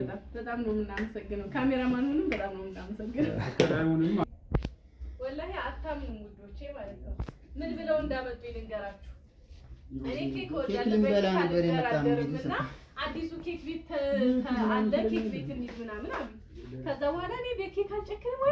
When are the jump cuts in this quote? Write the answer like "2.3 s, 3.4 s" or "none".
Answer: 4.2 s